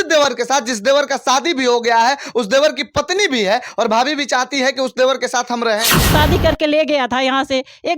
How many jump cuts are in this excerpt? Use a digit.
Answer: 1